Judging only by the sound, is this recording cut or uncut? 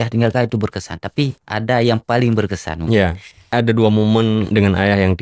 cut